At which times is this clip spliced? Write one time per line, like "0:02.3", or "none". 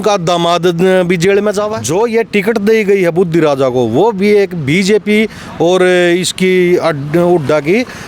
0:01.5